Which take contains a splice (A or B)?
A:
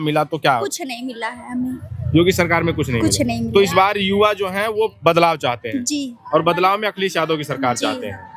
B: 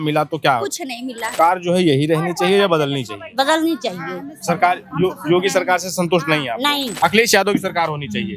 B